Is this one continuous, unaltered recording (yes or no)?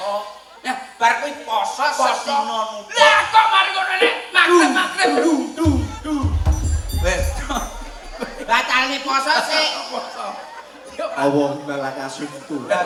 yes